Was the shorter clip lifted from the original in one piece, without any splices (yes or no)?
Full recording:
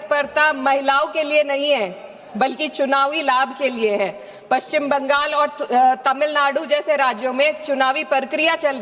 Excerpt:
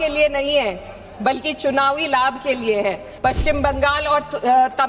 no